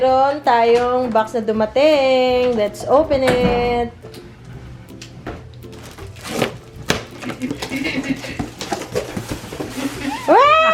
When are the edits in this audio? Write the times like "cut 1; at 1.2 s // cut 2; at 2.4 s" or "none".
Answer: none